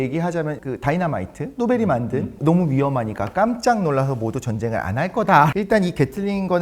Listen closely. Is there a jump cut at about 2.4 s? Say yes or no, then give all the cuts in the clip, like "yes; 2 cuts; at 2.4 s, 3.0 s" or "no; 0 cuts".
yes; 2 cuts; at 2.4 s, 5.5 s